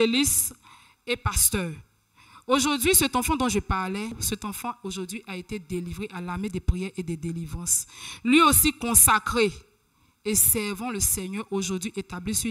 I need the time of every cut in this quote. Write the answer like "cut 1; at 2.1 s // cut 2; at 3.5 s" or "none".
cut 1; at 4.2 s